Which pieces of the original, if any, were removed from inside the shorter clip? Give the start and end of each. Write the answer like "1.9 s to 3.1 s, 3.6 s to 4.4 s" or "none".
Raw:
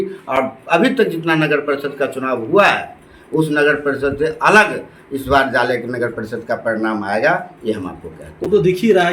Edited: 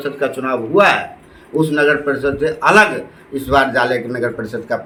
none